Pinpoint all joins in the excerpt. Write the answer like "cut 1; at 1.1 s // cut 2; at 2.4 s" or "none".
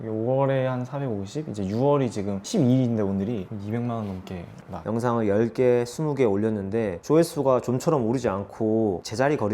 cut 1; at 4.8 s